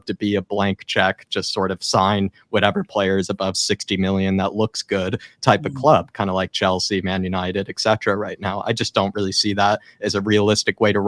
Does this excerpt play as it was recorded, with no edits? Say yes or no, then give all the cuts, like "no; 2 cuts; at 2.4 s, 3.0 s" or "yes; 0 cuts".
yes; 0 cuts